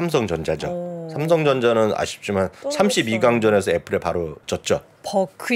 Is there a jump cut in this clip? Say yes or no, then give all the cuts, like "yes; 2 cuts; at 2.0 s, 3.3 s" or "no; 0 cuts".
yes; 1 cut; at 4.4 s